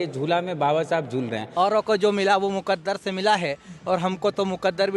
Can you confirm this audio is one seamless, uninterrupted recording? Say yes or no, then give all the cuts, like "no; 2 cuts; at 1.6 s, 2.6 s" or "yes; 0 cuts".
no; 1 cut; at 1.4 s